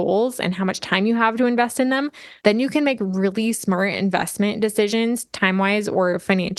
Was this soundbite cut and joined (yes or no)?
no